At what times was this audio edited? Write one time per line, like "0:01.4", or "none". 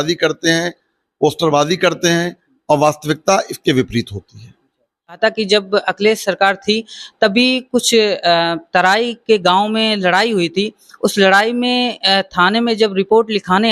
0:05.2